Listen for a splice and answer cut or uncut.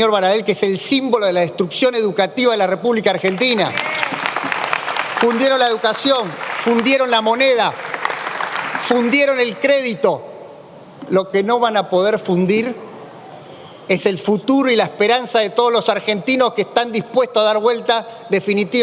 uncut